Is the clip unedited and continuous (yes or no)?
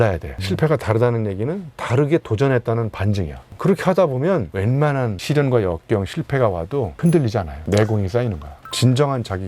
no